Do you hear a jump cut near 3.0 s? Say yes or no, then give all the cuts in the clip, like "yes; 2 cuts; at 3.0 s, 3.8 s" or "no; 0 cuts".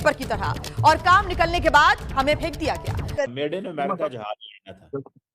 yes; 1 cut; at 3.0 s